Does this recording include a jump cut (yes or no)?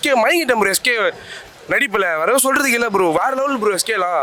no